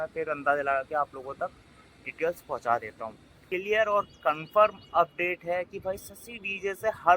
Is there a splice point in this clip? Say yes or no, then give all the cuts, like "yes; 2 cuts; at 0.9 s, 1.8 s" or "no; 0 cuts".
yes; 1 cut; at 3.3 s